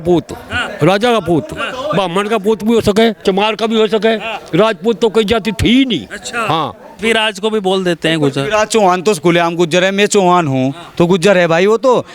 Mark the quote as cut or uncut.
cut